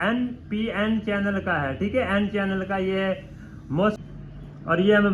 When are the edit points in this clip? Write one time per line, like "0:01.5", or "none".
0:04.0